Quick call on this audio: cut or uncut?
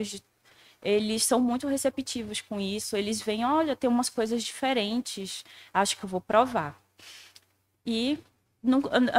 uncut